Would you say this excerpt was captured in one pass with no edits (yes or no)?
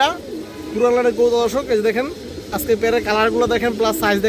yes